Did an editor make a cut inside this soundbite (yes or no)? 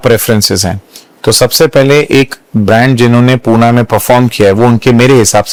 no